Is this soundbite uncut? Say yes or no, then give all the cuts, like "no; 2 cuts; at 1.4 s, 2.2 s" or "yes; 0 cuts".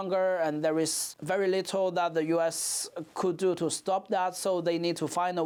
yes; 0 cuts